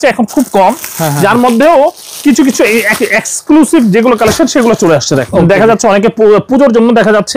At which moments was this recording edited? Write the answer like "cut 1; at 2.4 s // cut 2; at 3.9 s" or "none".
cut 1; at 5.3 s